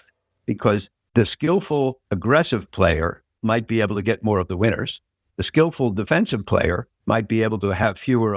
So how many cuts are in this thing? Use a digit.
3